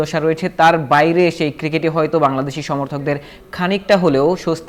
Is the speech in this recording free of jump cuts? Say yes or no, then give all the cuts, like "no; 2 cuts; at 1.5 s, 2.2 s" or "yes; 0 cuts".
yes; 0 cuts